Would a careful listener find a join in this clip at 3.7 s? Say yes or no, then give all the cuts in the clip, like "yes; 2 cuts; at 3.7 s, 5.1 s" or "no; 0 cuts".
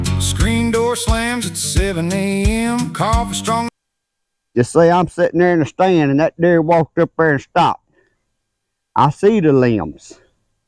yes; 1 cut; at 3.7 s